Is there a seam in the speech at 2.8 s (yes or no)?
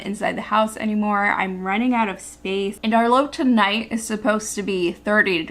yes